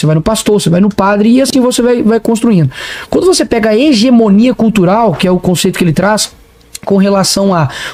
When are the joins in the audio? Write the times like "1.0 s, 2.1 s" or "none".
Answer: none